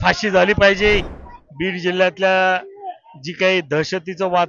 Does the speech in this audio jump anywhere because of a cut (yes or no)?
yes